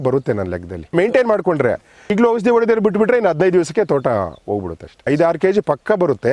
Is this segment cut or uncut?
cut